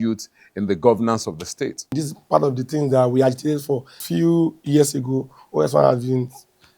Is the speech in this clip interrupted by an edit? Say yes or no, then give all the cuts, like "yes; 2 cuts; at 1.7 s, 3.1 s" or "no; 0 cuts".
yes; 2 cuts; at 2.0 s, 4.0 s